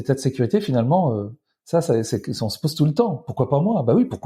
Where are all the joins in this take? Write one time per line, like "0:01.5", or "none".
none